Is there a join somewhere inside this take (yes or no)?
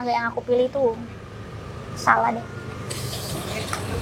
no